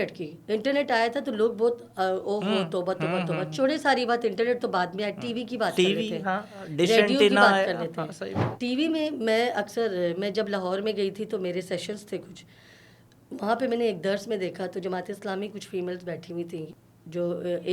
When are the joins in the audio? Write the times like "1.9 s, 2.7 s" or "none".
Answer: 16.8 s